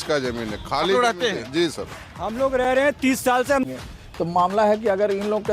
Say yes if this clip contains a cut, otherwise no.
yes